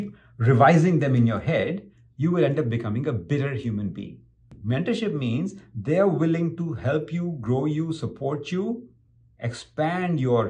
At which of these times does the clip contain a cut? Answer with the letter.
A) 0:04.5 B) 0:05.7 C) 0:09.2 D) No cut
A